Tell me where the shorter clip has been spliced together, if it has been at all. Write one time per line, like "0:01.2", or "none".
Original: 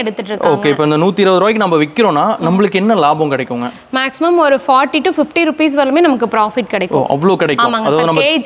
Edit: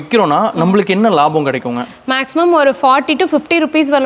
none